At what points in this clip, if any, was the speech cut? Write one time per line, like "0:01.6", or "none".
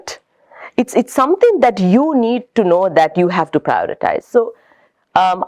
none